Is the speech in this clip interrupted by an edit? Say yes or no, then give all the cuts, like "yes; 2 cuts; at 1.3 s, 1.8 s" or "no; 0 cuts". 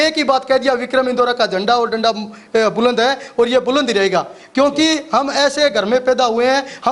no; 0 cuts